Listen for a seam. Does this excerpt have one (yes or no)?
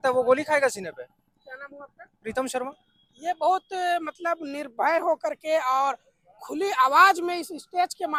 no